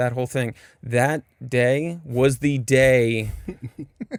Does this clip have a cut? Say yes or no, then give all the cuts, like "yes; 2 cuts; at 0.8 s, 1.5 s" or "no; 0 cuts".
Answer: no; 0 cuts